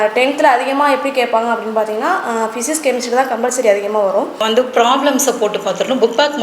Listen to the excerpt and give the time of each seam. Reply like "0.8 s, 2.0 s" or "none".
4.4 s